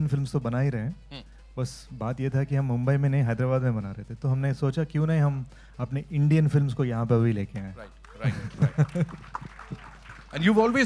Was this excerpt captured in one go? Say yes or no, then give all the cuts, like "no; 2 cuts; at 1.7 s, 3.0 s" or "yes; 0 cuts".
yes; 0 cuts